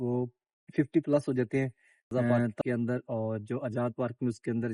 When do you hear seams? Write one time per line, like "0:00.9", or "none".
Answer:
0:02.5

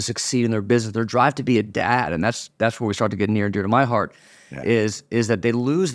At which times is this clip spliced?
none

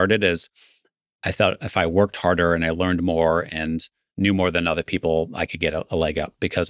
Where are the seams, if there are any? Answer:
none

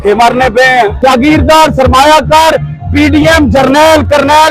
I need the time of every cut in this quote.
0:01.0

